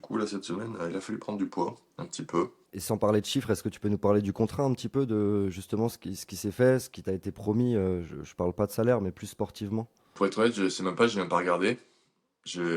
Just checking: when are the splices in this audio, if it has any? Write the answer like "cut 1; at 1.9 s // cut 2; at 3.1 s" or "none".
cut 1; at 2.7 s // cut 2; at 10.1 s

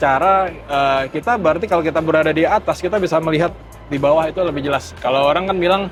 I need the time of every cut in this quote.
none

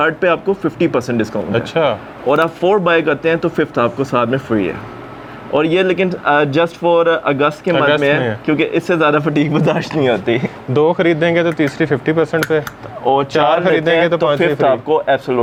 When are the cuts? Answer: none

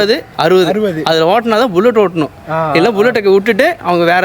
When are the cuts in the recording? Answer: none

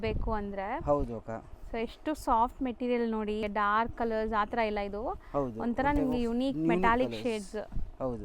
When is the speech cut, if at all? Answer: cut 1; at 3.5 s

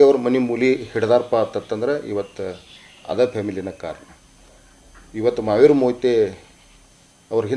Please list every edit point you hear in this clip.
none

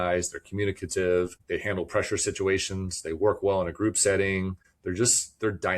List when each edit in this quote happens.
cut 1; at 1.4 s // cut 2; at 4.7 s

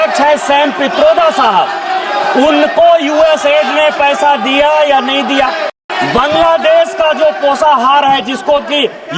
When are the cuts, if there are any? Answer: cut 1; at 5.8 s

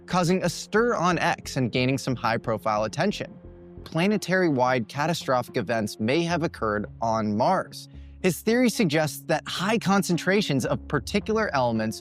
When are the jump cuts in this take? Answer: cut 1; at 3.9 s

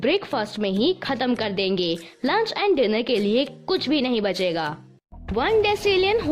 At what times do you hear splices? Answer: cut 1; at 5.2 s

